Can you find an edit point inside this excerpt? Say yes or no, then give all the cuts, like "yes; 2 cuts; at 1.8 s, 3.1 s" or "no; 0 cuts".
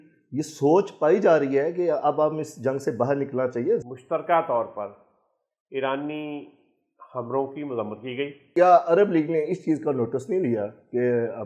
yes; 2 cuts; at 3.8 s, 8.5 s